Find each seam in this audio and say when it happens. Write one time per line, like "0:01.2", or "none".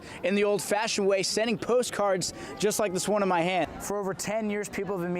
0:03.7